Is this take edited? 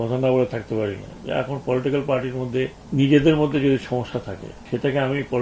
no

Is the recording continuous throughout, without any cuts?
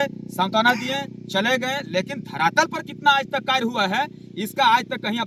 yes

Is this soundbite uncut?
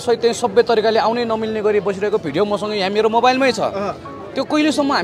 yes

